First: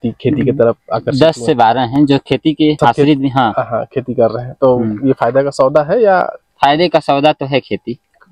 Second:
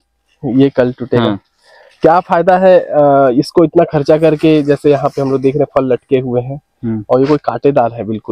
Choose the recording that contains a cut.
first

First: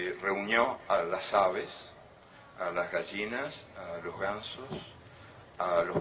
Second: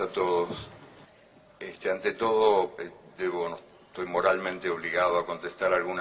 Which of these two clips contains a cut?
second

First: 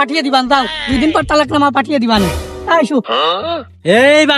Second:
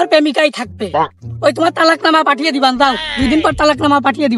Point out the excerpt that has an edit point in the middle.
first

